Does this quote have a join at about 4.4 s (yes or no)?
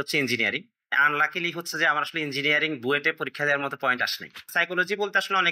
yes